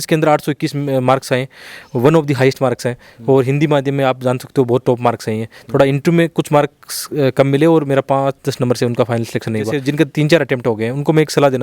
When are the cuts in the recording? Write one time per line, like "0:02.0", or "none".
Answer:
0:09.8